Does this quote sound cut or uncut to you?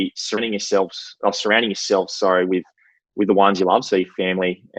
uncut